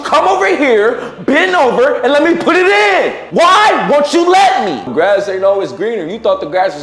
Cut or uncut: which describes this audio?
cut